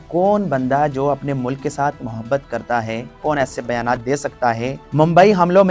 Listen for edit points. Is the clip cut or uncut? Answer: cut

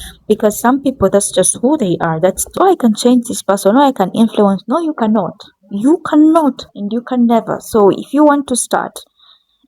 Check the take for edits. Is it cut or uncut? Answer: cut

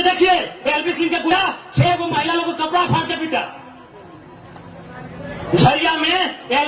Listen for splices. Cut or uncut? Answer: cut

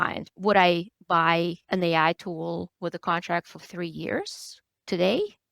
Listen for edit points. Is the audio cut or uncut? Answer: cut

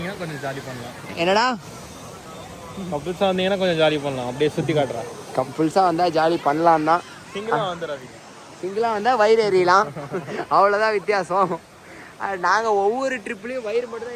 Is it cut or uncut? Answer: uncut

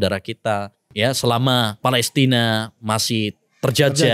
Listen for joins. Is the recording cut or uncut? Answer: cut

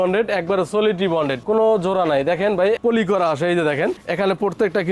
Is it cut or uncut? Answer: cut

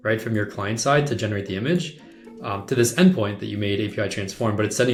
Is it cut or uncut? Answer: uncut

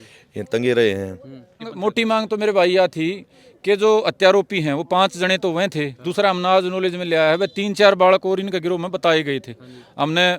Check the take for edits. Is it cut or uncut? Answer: cut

